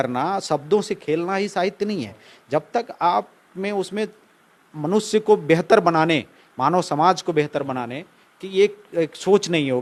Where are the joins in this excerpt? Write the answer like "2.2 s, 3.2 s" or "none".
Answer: none